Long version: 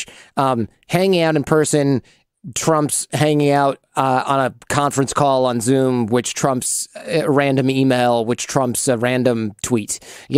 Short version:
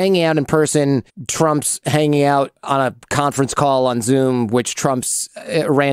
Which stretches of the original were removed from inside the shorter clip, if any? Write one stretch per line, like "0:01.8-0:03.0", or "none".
0:02.2-0:02.5
0:03.9-0:04.2